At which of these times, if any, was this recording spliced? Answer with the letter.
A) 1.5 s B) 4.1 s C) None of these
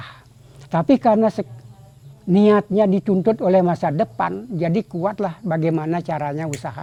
C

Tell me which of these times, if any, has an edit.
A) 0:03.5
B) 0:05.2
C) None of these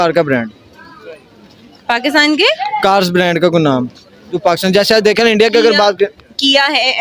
C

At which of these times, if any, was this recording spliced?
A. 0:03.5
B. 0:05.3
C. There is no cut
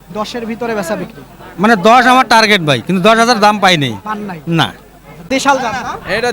B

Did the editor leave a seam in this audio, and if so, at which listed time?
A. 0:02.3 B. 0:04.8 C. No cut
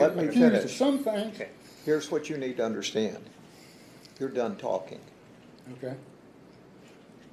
C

